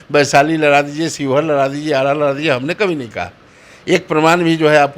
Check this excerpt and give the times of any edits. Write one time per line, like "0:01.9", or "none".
none

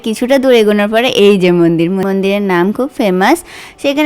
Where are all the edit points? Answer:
0:02.0

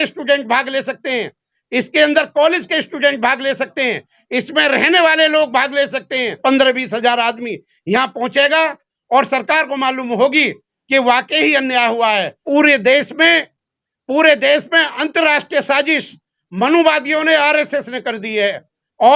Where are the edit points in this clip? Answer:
0:06.4
0:12.4

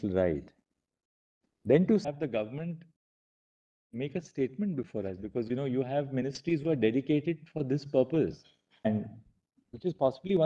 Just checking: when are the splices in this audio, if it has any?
0:02.0
0:08.9

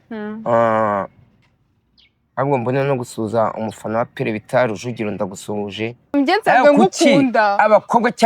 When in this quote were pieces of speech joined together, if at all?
0:06.1

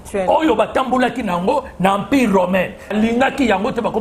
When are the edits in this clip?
0:02.9

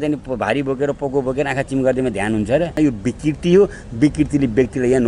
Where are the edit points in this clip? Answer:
0:02.8

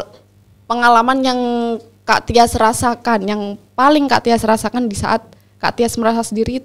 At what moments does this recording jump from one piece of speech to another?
none

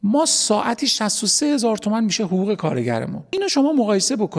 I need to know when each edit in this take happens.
0:03.3

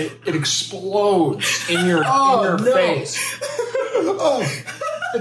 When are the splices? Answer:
none

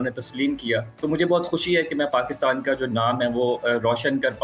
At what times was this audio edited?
0:00.9

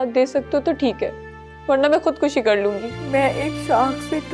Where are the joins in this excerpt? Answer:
0:02.9

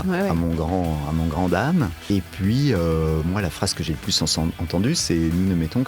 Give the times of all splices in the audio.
0:02.0

